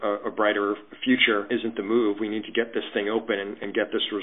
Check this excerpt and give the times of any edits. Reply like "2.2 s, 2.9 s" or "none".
1.5 s